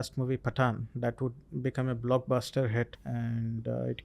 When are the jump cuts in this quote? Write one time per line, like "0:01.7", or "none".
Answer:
0:03.0